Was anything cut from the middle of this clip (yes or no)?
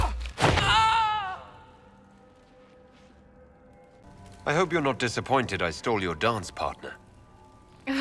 yes